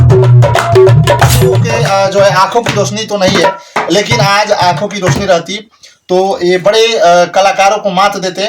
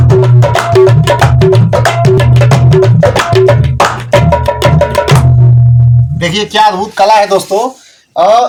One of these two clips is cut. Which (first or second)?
first